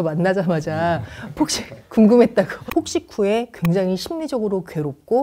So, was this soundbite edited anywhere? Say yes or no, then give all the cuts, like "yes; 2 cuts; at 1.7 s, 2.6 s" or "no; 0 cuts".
yes; 1 cut; at 2.6 s